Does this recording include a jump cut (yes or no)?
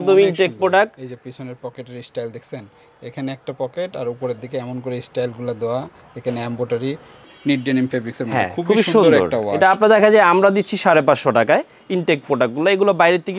yes